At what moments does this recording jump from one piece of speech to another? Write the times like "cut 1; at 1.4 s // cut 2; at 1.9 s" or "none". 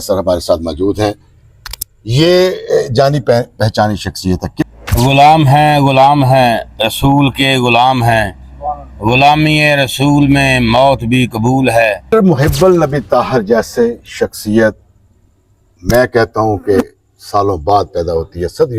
cut 1; at 4.6 s // cut 2; at 12.0 s